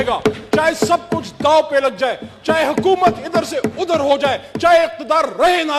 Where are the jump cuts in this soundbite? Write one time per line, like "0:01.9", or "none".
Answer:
none